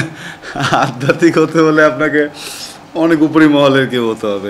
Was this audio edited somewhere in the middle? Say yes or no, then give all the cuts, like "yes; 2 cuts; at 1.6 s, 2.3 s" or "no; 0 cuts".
no; 0 cuts